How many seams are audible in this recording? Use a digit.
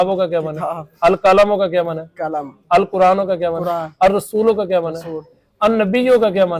0